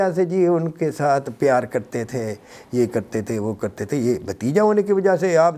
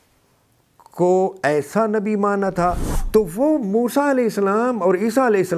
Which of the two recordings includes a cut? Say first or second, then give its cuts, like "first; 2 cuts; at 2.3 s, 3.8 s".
second; 1 cut; at 2.9 s